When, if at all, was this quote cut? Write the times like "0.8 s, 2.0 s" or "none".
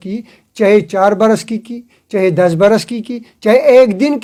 none